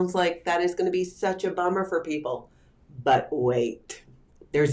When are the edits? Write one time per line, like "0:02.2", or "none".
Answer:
none